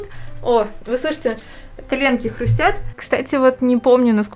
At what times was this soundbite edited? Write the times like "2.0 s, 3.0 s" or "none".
2.9 s